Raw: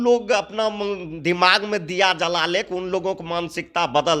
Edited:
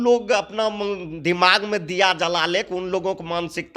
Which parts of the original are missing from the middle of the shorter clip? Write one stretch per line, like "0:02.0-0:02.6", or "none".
none